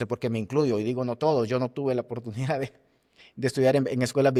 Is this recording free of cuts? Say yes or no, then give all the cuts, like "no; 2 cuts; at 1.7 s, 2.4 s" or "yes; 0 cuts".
yes; 0 cuts